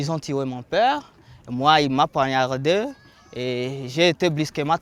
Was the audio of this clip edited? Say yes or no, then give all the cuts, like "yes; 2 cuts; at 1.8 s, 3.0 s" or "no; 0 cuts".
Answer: no; 0 cuts